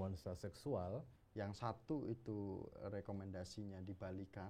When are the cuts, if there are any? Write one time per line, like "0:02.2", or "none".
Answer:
0:01.2